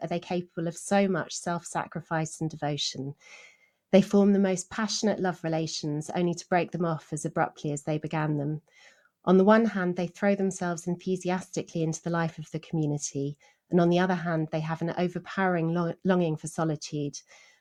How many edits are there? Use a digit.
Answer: 0